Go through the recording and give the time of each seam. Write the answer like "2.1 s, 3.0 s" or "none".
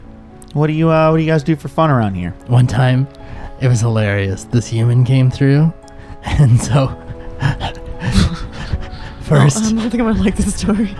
2.3 s

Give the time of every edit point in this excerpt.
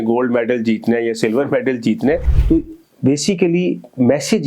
2.3 s

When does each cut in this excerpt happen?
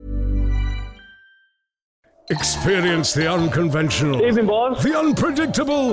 2.1 s

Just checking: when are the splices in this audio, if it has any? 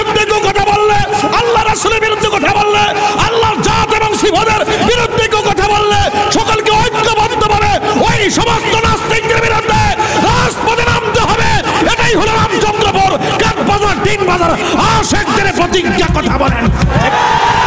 none

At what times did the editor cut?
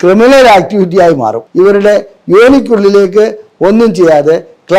1.4 s

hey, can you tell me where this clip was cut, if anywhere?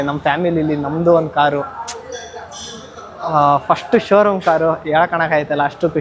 none

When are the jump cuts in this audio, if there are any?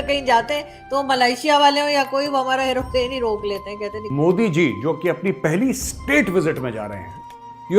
4.0 s

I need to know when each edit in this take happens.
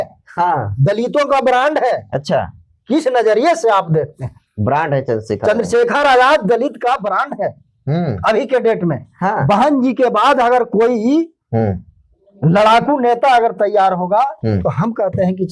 none

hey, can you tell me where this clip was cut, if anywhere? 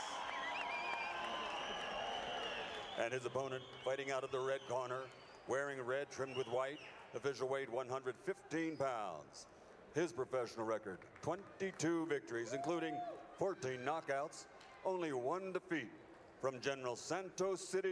16.8 s

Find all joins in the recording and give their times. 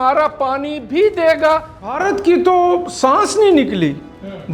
1.9 s

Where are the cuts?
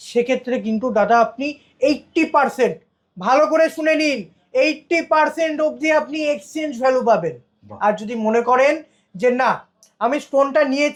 none

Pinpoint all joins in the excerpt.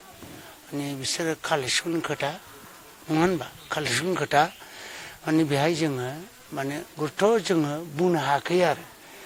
none

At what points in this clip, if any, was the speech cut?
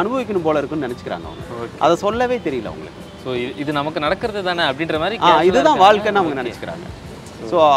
none

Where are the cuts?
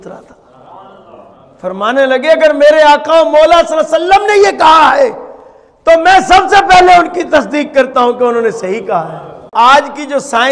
9.5 s

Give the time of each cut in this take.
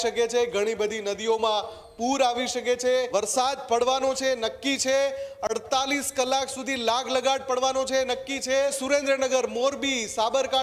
3.1 s, 8.8 s

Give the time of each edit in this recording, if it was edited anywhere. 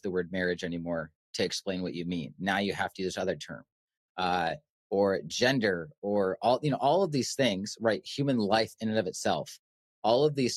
none

